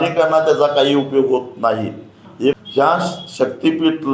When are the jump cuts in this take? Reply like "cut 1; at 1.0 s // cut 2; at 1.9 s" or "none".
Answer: cut 1; at 2.6 s